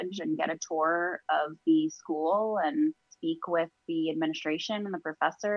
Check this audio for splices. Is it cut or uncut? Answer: cut